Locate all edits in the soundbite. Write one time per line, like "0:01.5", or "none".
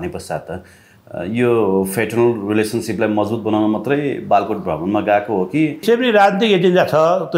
0:05.8